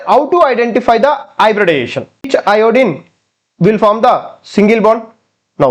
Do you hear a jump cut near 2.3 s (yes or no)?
yes